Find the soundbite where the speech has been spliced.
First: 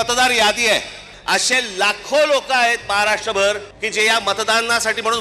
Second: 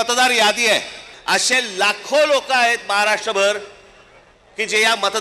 first; 1 cut; at 3.7 s

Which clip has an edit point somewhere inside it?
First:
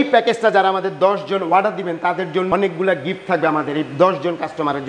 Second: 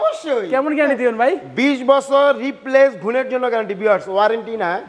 first; 1 cut; at 2.5 s

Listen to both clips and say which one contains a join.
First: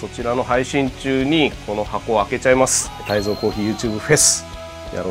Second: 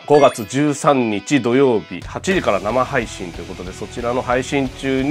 first; 1 cut; at 3.0 s

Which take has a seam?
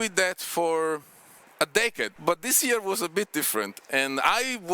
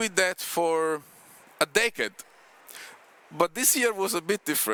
first; 1 cut; at 2.2 s

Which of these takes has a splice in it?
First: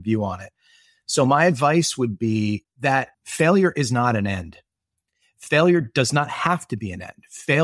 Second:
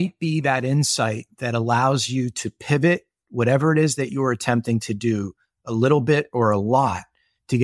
first; 1 cut; at 3.2 s

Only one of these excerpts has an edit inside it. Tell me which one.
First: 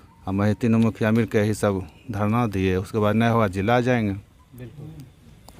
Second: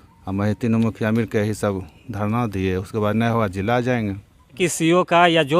second; 1 cut; at 4.6 s

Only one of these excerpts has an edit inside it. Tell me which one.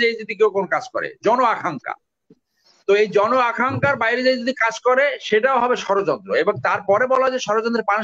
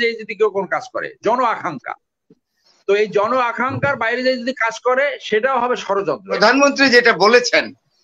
second; 1 cut; at 6.4 s

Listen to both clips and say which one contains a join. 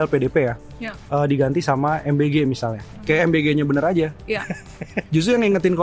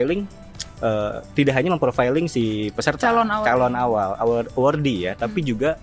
first; 1 cut; at 3.0 s

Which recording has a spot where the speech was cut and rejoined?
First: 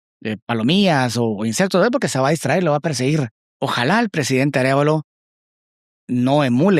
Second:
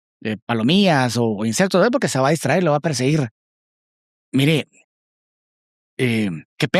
first; 1 cut; at 3.4 s

